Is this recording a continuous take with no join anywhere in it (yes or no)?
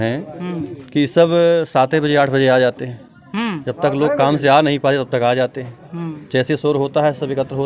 yes